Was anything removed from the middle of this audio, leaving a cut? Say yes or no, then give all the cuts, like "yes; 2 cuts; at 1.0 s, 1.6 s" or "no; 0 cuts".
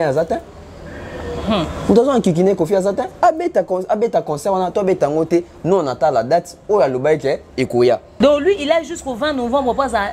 yes; 1 cut; at 8.1 s